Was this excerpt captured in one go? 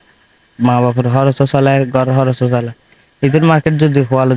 yes; 0 cuts

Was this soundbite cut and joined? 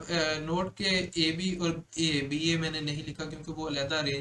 no; 0 cuts

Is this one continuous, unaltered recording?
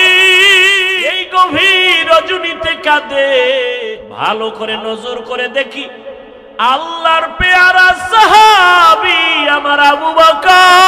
no; 2 cuts; at 1.1 s, 3.8 s

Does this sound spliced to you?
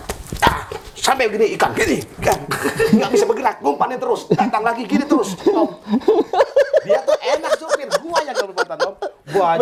no; 0 cuts

